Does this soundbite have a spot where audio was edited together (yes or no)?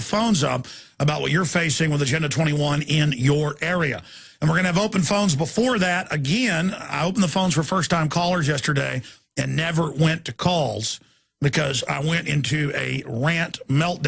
yes